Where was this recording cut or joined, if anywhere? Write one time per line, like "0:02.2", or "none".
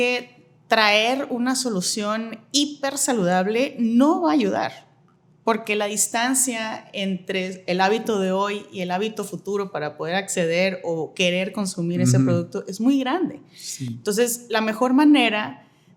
none